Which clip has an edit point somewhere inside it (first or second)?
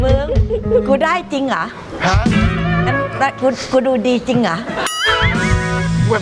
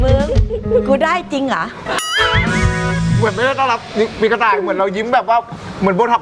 second